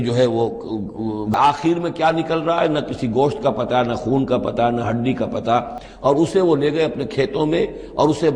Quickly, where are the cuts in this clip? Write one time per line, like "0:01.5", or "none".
0:01.3
0:05.8